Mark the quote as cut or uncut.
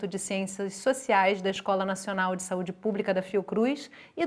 uncut